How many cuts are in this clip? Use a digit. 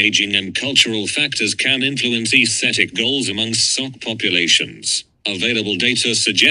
0